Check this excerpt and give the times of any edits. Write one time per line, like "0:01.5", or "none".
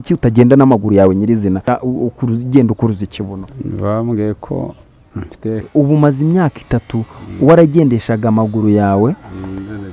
0:01.7
0:05.7